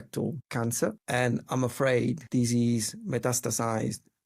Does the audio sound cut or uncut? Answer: cut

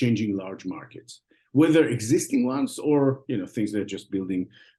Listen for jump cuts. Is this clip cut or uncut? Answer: uncut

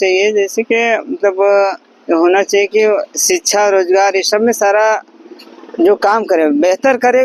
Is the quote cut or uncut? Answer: uncut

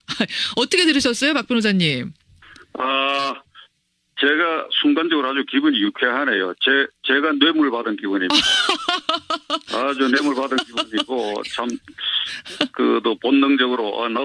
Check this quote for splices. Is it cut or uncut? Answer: uncut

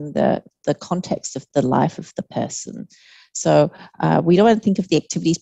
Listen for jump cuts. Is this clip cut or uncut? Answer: uncut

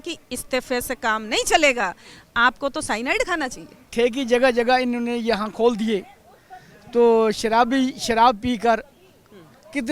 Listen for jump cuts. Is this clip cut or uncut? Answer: cut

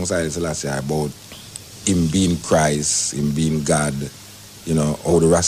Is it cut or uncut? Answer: uncut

